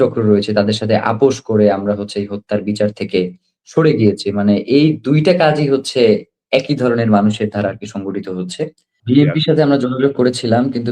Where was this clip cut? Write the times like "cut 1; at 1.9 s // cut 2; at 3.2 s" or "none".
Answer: cut 1; at 8.9 s